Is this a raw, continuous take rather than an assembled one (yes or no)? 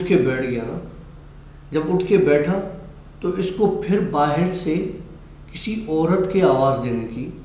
yes